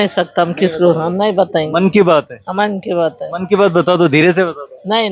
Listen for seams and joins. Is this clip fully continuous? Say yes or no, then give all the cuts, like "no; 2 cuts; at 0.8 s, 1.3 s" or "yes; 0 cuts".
yes; 0 cuts